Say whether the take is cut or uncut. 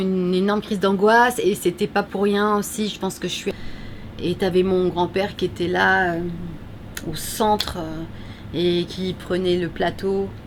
cut